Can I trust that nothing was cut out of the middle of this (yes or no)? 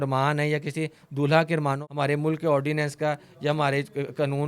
no